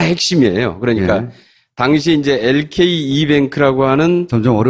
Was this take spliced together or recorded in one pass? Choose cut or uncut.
cut